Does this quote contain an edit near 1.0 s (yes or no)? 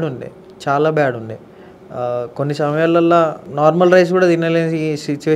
no